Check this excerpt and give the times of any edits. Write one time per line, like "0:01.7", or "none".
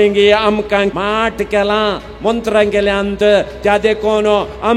0:00.9